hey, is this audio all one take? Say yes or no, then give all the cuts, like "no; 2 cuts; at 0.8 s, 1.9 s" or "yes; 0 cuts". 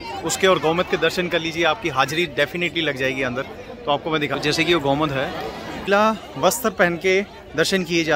no; 1 cut; at 5.9 s